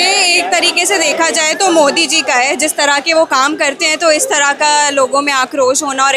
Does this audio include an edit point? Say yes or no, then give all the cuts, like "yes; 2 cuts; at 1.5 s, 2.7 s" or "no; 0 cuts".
no; 0 cuts